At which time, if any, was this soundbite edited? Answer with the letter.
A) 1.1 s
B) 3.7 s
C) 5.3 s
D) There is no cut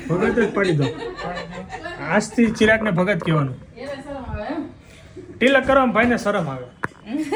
D